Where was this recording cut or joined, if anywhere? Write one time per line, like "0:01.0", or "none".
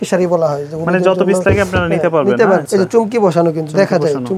0:02.7